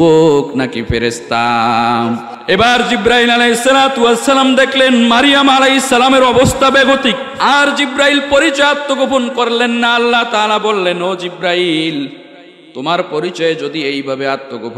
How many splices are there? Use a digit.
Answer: 2